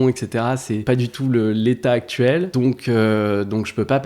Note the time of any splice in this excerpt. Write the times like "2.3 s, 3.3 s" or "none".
0.8 s, 2.5 s